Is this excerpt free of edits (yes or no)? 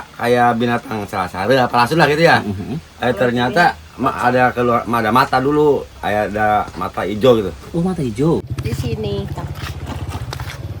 no